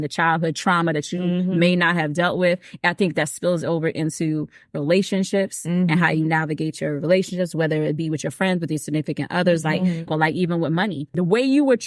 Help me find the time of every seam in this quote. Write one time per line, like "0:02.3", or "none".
0:10.1
0:11.1

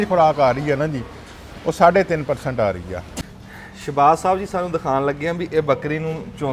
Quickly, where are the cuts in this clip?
0:03.2

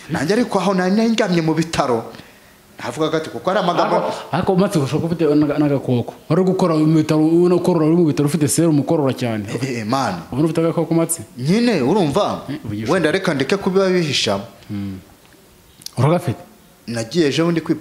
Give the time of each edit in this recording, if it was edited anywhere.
none

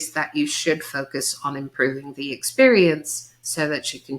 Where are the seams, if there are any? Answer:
none

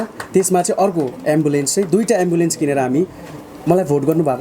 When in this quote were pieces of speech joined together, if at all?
0:03.3

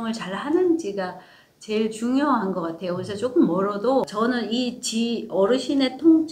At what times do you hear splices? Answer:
0:04.1

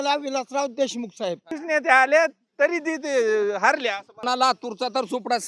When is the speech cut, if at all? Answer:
0:01.5
0:04.1

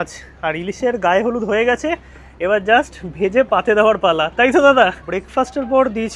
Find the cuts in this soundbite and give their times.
0:05.0

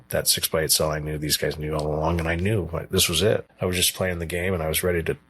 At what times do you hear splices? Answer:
0:03.5

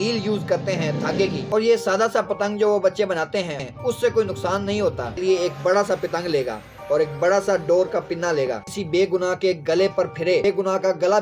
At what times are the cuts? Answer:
0:01.4
0:03.6
0:05.2
0:08.7
0:10.4

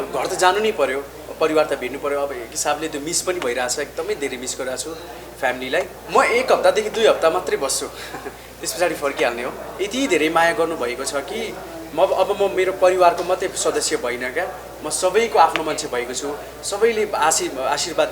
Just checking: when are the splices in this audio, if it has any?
0:06.0
0:09.6

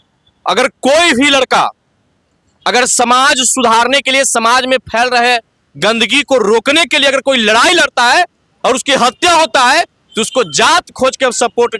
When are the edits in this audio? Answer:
none

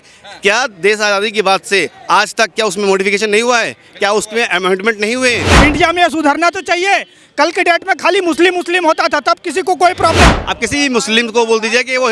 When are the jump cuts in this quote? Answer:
0:05.5
0:10.3

